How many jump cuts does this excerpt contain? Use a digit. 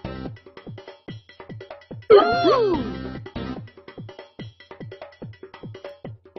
2